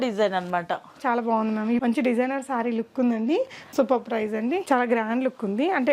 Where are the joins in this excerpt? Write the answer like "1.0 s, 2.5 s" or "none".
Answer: 1.8 s, 3.6 s, 4.6 s